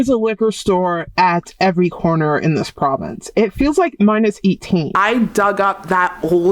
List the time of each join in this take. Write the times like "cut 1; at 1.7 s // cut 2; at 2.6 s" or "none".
cut 1; at 4.9 s